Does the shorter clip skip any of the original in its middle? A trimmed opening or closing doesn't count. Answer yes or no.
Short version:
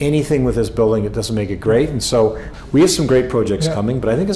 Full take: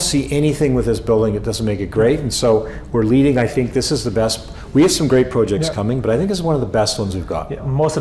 yes